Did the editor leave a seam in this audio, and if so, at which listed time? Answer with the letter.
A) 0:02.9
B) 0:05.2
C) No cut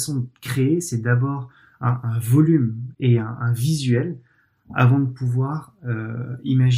A